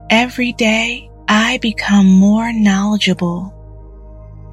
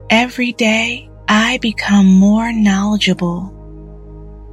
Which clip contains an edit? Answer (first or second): second